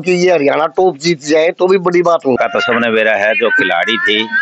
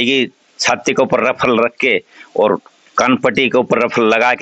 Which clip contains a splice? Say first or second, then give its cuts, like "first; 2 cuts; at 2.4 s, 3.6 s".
first; 1 cut; at 2.4 s